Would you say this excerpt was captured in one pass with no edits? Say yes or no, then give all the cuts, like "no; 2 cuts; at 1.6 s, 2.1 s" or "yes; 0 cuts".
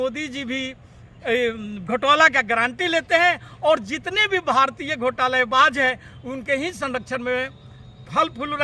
yes; 0 cuts